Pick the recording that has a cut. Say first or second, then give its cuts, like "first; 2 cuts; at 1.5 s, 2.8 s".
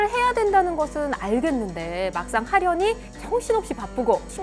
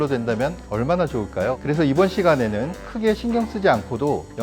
second; 1 cut; at 1.6 s